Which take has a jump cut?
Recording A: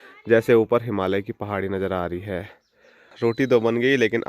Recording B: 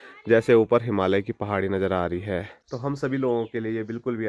A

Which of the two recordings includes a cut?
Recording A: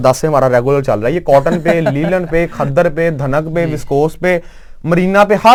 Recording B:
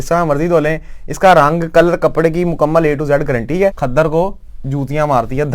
B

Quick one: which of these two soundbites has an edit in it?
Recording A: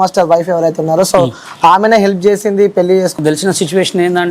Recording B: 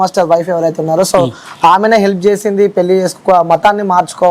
A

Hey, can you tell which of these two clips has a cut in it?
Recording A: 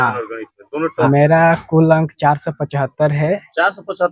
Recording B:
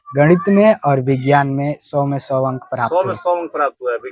A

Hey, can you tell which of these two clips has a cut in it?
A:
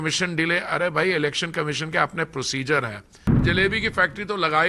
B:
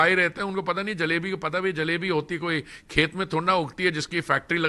A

